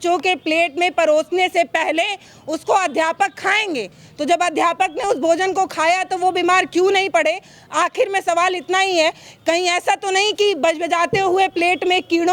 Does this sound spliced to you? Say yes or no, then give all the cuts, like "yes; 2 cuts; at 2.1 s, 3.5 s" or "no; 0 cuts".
no; 0 cuts